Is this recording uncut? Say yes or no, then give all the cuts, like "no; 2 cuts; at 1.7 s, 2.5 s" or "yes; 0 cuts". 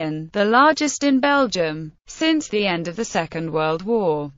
no; 1 cut; at 2.5 s